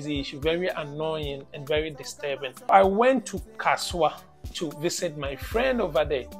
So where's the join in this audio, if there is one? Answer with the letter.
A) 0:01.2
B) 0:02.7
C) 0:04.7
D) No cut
B